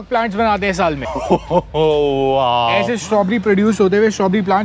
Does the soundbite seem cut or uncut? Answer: cut